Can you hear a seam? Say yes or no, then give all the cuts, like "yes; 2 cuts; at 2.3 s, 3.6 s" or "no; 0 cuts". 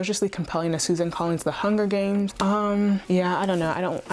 no; 0 cuts